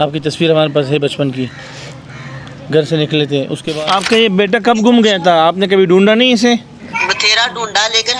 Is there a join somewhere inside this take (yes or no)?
yes